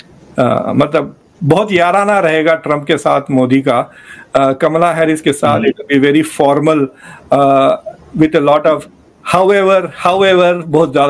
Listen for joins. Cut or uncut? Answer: uncut